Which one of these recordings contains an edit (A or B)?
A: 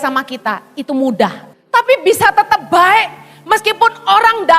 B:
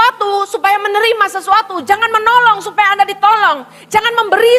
A